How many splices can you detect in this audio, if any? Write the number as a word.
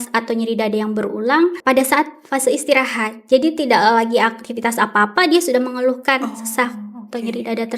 one